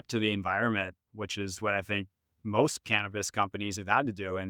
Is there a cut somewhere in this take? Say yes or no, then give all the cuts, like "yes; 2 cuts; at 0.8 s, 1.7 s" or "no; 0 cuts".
no; 0 cuts